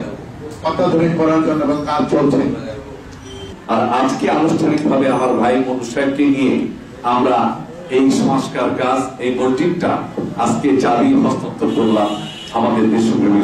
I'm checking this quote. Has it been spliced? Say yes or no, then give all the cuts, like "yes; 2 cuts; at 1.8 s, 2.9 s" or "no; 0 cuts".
yes; 1 cut; at 3.5 s